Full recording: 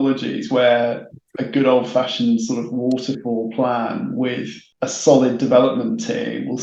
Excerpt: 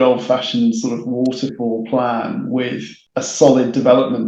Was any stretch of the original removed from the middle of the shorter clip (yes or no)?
no